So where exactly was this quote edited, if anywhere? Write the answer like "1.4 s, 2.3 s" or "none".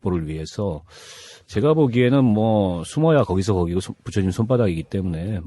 1.7 s